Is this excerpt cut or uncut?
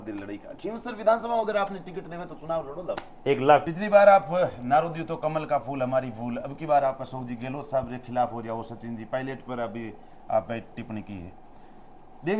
cut